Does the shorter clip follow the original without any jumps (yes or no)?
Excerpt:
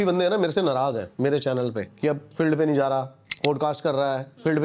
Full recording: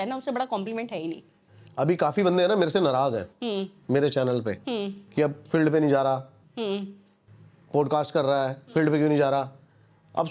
no